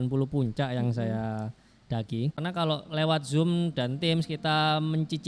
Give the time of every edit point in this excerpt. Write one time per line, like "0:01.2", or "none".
0:02.4